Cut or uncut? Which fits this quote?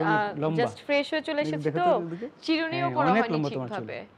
uncut